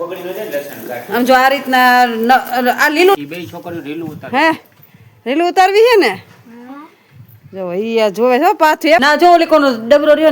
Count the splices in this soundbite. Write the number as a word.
two